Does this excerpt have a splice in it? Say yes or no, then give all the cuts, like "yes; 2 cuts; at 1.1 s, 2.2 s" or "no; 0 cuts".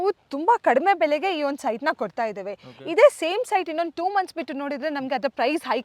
no; 0 cuts